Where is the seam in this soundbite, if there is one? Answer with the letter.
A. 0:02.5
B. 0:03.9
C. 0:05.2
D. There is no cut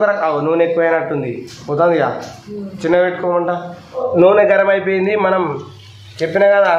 B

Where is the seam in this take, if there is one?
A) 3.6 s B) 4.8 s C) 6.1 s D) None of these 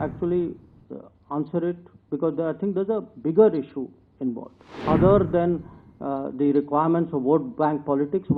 B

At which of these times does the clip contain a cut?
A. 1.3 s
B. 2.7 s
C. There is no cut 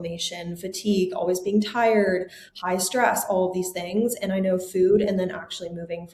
C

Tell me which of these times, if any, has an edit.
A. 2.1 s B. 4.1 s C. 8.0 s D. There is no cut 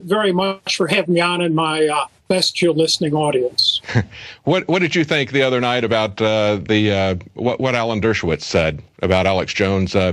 C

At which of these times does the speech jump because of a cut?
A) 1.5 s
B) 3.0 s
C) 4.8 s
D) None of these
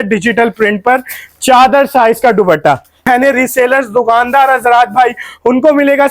B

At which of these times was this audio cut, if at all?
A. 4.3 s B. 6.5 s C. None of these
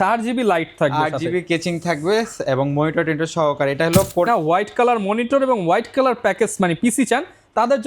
A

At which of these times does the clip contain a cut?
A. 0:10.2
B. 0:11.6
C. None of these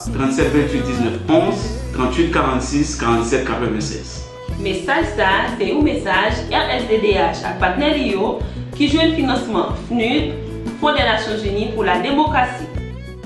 A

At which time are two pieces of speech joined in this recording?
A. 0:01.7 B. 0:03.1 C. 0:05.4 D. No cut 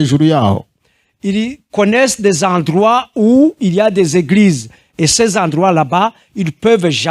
D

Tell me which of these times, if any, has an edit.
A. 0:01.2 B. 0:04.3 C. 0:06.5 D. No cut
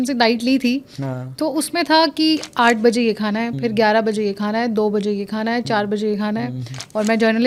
D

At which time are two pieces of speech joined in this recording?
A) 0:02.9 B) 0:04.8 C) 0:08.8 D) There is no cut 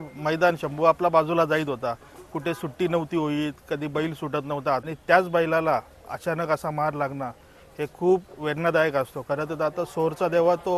B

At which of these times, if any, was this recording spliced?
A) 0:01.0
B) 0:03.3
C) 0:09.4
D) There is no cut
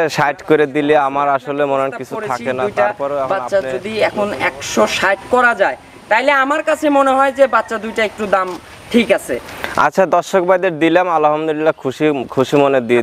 B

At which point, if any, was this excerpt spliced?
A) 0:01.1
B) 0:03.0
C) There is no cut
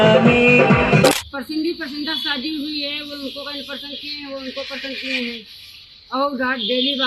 A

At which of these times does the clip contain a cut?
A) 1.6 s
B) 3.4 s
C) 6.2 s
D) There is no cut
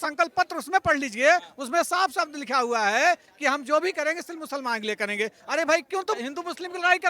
C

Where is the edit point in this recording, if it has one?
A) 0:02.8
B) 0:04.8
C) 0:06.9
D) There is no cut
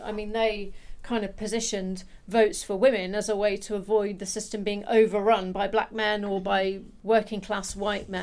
C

